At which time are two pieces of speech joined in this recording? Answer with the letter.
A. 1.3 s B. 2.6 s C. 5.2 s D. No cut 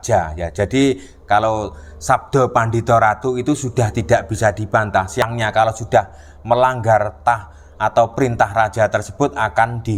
C